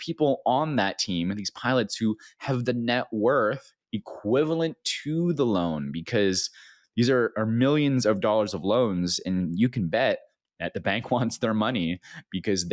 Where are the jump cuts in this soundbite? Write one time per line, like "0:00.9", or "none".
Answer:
none